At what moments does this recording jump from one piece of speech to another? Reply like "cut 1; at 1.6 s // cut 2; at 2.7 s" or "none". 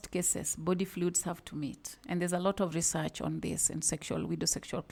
none